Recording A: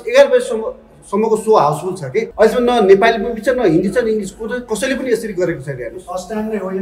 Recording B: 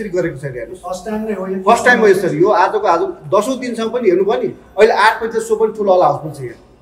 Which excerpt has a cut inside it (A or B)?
A